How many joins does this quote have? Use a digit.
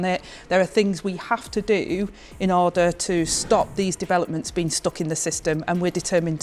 0